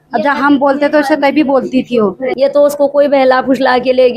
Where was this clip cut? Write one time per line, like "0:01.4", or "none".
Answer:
0:02.3